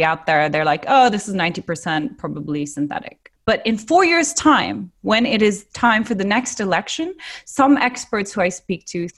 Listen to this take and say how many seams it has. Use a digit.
1